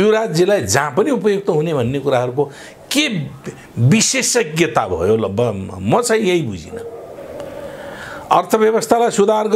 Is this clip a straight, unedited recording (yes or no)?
yes